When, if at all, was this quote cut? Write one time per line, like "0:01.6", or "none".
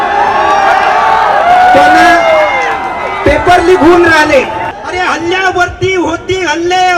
0:04.7